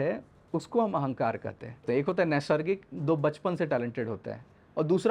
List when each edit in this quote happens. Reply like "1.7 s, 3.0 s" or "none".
1.8 s

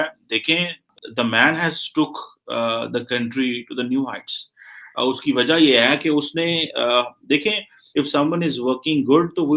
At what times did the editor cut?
0.9 s, 7.8 s

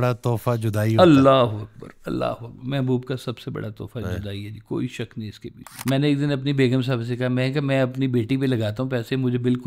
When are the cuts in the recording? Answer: 1.0 s, 5.8 s

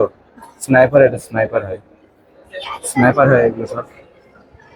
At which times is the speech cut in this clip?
none

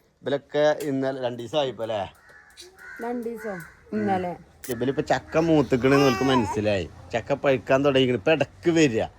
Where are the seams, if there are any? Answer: 4.7 s

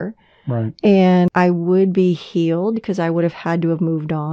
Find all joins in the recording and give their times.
1.3 s

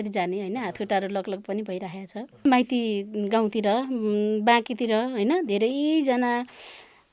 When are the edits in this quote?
2.4 s

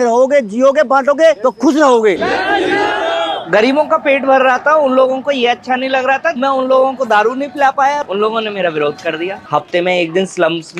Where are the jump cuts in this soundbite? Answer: 2.2 s, 3.4 s, 6.4 s, 8.0 s, 9.4 s

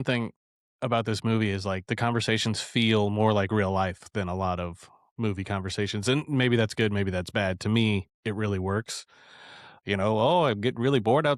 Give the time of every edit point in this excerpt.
none

